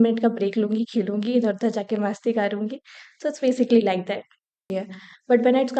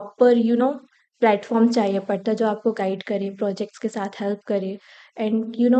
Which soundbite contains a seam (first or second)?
first